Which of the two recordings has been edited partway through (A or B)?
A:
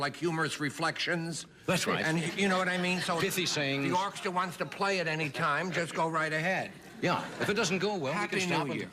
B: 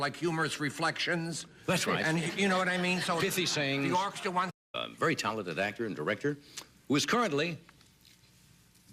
A